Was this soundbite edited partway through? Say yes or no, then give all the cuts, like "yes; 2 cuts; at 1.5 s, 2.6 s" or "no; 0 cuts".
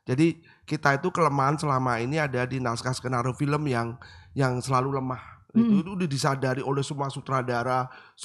no; 0 cuts